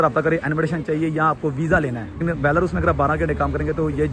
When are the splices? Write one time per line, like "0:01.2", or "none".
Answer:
0:02.2

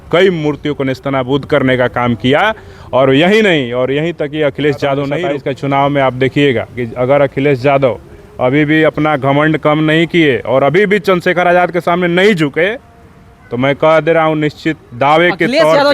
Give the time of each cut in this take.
0:05.1

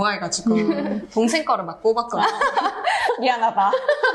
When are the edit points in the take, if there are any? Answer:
0:03.1

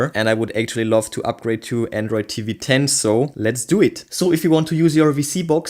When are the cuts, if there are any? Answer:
0:04.1

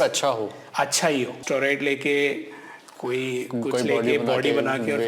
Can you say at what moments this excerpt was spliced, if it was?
0:01.4

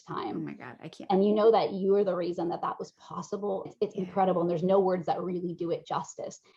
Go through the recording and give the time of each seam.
0:03.7

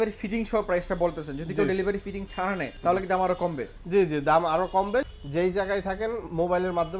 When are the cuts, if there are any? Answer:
0:02.7
0:05.1

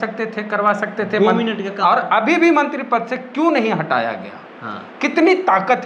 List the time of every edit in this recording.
none

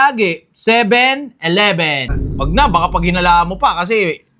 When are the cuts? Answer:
0:02.1

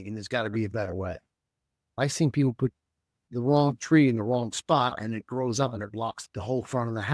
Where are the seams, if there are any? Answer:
0:01.9

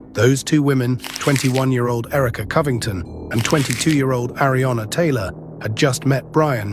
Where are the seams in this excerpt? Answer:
0:03.1
0:04.4

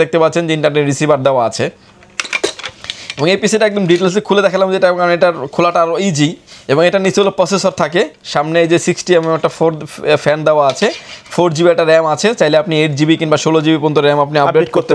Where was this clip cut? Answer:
none

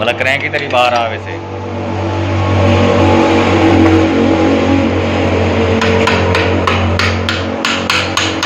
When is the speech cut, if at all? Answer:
none

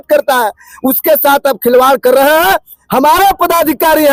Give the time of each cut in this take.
none

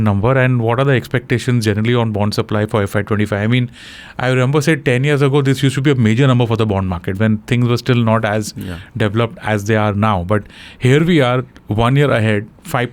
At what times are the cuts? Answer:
none

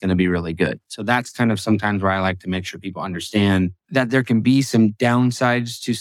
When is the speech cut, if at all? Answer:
0:03.8
0:05.0

